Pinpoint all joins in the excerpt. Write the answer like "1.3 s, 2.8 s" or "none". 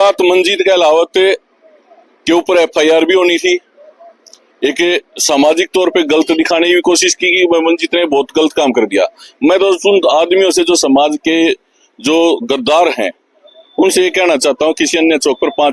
none